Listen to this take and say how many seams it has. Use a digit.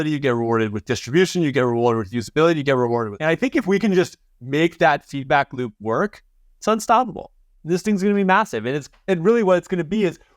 1